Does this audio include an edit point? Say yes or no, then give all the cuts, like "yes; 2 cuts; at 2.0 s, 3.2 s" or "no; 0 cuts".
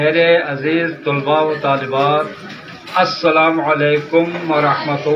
no; 0 cuts